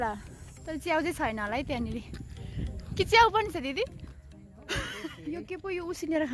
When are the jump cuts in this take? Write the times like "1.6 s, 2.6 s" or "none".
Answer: 4.9 s